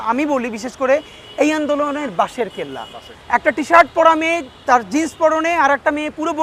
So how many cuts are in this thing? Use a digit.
1